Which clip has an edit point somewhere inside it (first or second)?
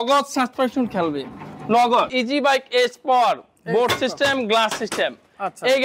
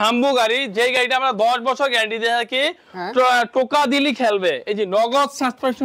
first